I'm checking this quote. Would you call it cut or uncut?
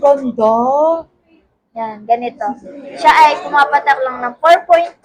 uncut